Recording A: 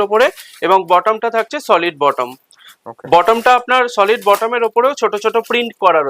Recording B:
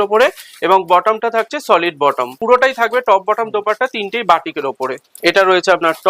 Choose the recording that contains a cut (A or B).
B